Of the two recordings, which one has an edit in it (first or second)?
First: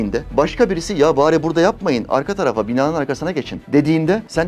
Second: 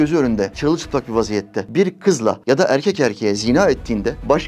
first